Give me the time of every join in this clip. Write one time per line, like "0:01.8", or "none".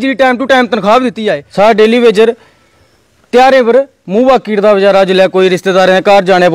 0:01.4